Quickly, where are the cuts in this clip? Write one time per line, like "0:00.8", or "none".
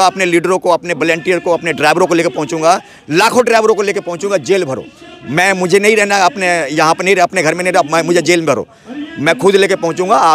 none